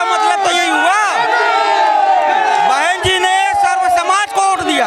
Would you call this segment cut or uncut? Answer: uncut